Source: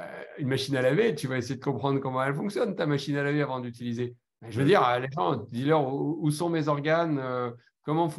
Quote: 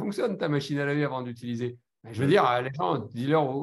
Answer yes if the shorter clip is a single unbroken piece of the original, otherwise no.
yes